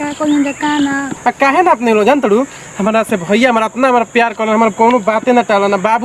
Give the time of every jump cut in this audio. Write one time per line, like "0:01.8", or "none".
0:01.1